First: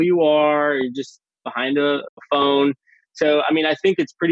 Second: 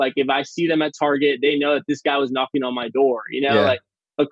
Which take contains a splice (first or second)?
first